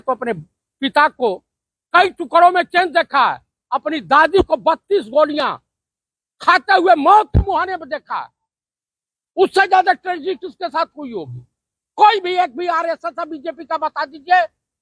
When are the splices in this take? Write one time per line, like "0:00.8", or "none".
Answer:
none